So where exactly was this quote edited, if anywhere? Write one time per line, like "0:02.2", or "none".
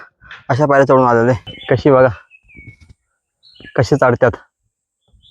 0:01.5